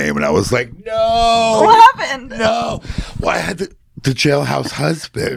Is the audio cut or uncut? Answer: uncut